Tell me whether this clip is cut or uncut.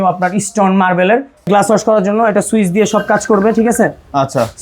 cut